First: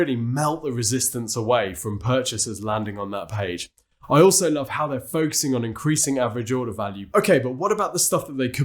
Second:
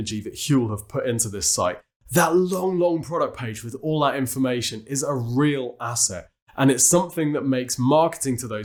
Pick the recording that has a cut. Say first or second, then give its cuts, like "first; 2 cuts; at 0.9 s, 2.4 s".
first; 1 cut; at 7.0 s